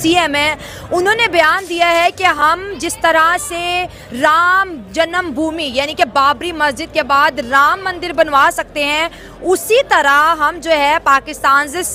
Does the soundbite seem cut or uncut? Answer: uncut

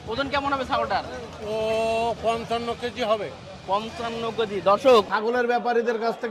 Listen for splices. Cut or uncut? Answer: cut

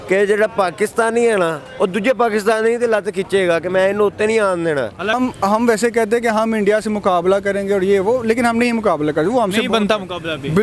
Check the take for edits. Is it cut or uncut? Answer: cut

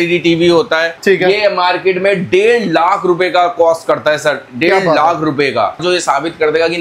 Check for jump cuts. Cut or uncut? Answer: cut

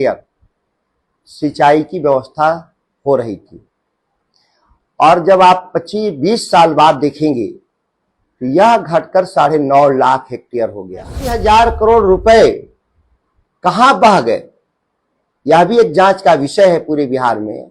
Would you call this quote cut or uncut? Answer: cut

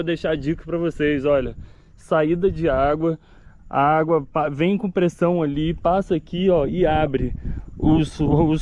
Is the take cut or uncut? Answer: uncut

